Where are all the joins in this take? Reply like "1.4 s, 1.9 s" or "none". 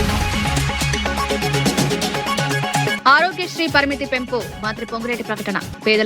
3.0 s